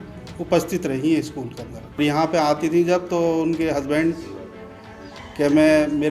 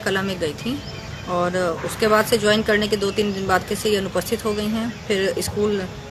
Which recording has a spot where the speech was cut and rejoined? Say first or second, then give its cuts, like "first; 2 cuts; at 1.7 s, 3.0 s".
first; 1 cut; at 2.0 s